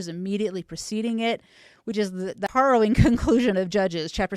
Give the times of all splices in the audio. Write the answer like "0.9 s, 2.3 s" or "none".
2.5 s